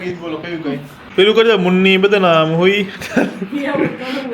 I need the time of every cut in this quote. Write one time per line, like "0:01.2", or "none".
0:00.9